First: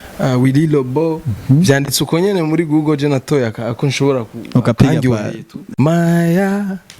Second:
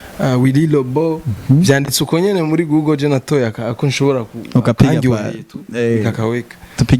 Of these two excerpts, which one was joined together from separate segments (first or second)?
first